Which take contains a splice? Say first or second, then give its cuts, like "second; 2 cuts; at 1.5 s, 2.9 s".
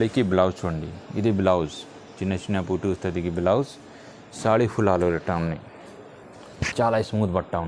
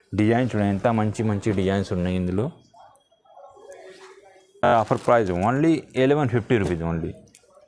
second; 1 cut; at 4.7 s